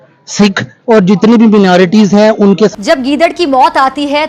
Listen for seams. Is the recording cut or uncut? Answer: cut